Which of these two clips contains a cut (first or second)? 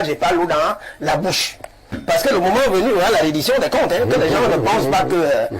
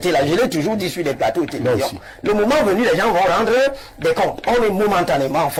first